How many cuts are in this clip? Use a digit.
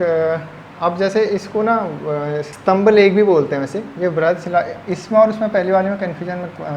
1